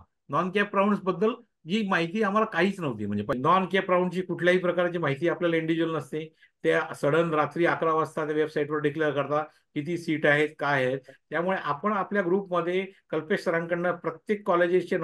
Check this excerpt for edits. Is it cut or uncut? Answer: cut